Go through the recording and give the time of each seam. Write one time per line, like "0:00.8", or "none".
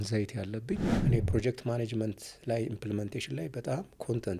0:00.9